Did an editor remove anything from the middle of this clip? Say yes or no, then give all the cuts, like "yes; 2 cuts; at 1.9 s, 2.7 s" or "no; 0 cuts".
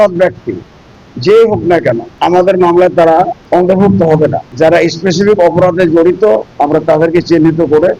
yes; 4 cuts; at 2.1 s, 3.4 s, 4.4 s, 6.5 s